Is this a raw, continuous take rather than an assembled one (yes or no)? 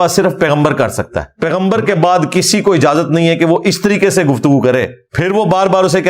no